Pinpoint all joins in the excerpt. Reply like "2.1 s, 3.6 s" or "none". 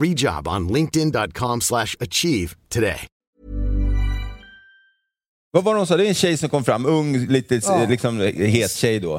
3.2 s, 5.5 s